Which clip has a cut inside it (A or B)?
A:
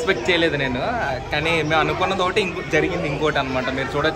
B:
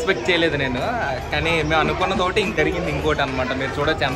B